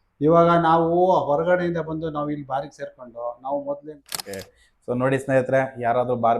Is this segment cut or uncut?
cut